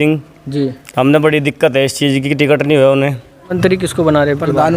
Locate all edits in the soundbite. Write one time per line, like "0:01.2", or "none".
0:03.5